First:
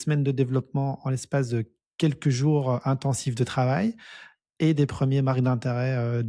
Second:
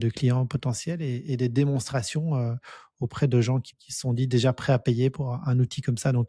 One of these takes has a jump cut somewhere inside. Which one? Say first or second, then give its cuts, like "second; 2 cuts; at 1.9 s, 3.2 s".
second; 1 cut; at 3.7 s